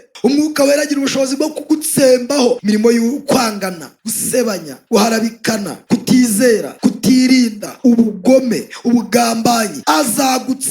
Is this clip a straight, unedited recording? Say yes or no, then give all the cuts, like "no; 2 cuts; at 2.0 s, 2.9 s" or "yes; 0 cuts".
no; 6 cuts; at 2.6 s, 4.4 s, 5.7 s, 6.7 s, 7.6 s, 9.7 s